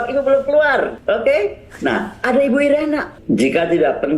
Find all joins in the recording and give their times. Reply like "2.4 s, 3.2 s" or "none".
1.0 s, 3.1 s